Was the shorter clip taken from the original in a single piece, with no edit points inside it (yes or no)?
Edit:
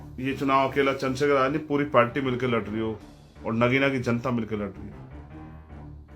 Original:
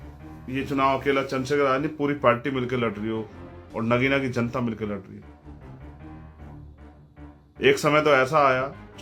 no